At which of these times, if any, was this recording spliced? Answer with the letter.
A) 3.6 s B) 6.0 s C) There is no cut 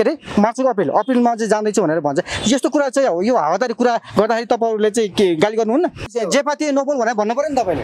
B